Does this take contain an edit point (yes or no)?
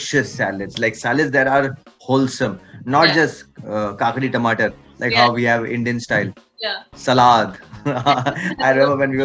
no